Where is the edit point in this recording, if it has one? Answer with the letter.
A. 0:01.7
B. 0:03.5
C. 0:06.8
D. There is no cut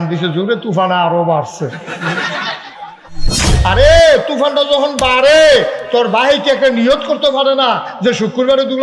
B